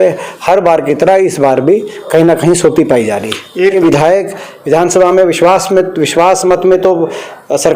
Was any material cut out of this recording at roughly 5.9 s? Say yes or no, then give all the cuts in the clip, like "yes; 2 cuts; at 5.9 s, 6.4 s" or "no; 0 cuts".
no; 1 cut; at 3.7 s